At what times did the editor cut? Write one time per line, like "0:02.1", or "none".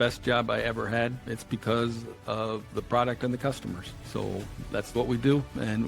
0:01.3
0:03.9